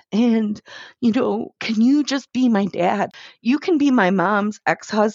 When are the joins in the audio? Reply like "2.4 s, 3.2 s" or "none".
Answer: 3.1 s